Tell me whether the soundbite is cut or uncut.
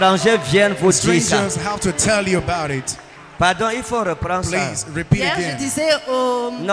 uncut